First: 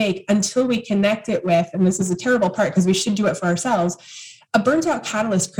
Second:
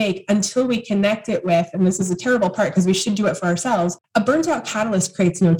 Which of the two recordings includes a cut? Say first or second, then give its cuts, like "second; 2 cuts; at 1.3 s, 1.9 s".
second; 1 cut; at 4.0 s